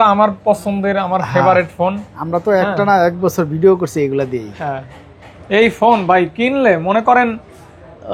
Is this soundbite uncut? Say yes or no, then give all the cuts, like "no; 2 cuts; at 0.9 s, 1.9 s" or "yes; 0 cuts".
yes; 0 cuts